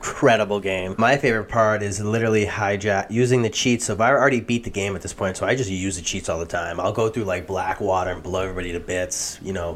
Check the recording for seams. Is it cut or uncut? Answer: cut